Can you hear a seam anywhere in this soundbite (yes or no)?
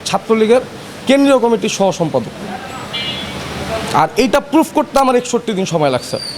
no